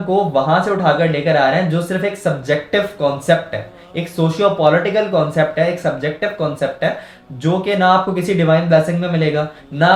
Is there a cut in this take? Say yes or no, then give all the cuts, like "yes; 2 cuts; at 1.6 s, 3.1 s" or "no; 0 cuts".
no; 0 cuts